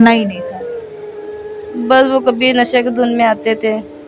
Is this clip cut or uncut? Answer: uncut